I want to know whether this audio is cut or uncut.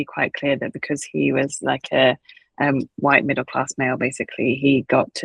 uncut